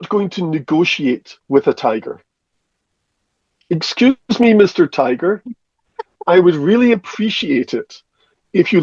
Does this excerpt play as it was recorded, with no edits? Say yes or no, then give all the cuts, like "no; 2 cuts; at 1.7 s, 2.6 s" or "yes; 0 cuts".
yes; 0 cuts